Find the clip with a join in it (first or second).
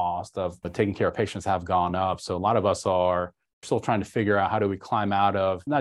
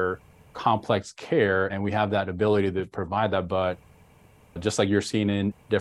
second